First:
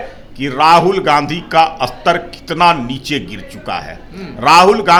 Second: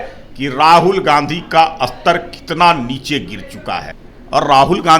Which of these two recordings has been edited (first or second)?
second